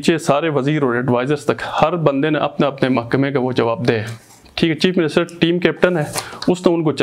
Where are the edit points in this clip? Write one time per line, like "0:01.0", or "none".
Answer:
none